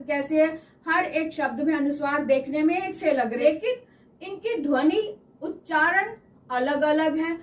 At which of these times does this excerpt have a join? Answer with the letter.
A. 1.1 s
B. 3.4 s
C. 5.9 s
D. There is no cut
B